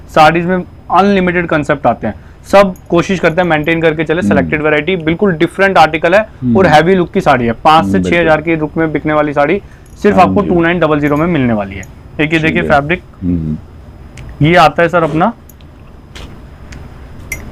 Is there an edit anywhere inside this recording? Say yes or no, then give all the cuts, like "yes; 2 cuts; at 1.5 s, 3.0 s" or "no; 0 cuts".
no; 0 cuts